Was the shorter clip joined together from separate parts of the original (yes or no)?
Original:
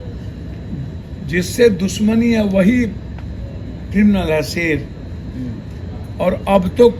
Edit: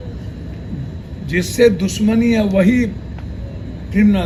no